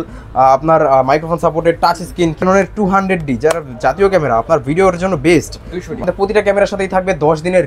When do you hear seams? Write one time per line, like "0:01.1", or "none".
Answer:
0:02.4
0:06.0